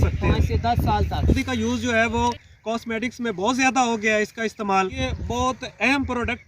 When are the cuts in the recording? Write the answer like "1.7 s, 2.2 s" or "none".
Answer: 1.4 s, 5.0 s